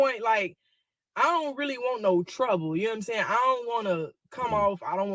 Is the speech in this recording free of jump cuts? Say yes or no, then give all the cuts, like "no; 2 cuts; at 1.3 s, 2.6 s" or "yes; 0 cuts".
yes; 0 cuts